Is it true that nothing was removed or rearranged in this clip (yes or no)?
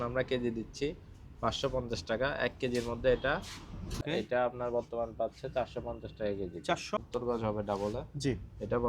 no